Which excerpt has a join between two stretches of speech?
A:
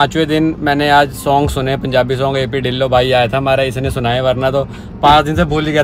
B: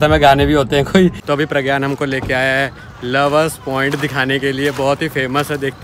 B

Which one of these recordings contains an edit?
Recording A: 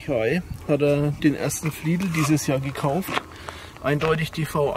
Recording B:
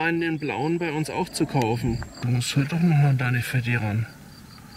B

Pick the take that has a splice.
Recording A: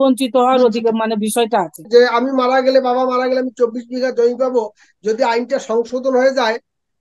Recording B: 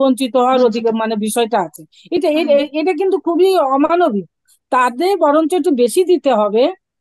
A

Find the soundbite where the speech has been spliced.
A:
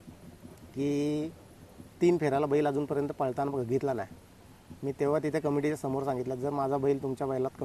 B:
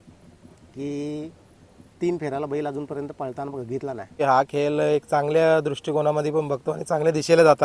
B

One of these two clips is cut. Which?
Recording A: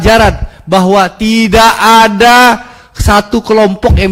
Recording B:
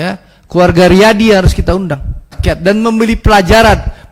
B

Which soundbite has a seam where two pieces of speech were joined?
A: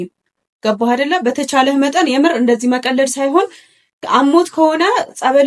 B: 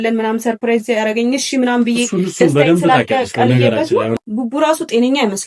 B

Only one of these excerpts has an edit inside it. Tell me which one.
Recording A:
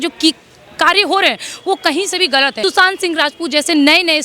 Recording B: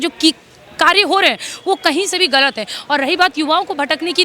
A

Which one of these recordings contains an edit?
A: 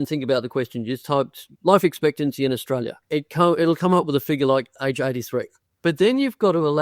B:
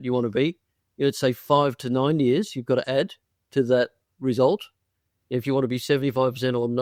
A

